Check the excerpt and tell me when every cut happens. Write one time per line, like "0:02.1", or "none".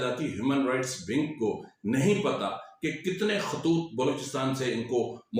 none

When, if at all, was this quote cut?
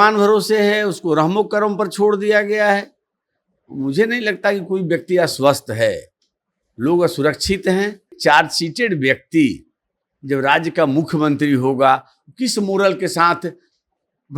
0:08.2

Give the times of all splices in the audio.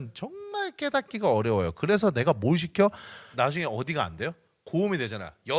0:03.3

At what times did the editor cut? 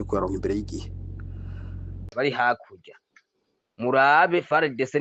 0:02.0

